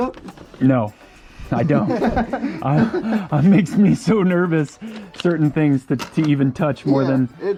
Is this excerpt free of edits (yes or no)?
yes